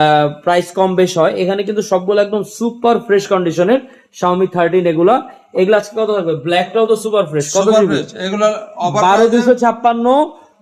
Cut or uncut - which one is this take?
uncut